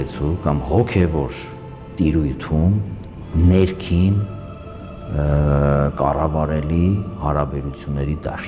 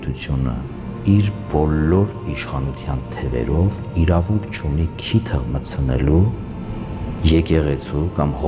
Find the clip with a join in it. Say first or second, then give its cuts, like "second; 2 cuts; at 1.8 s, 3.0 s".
second; 1 cut; at 6.7 s